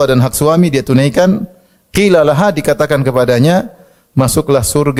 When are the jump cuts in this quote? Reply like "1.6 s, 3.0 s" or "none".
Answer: none